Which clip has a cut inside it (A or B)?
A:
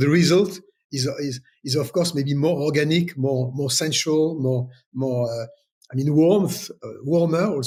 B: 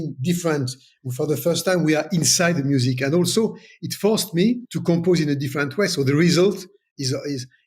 B